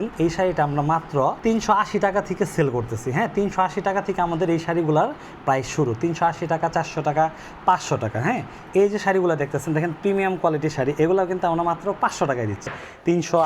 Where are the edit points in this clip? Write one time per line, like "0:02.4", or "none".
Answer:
0:01.4
0:12.7